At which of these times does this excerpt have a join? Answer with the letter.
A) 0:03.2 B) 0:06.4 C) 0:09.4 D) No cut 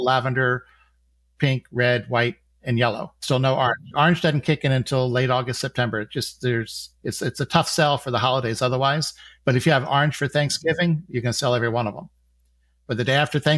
A